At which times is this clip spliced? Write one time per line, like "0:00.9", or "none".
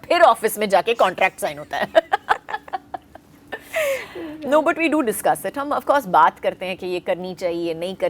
none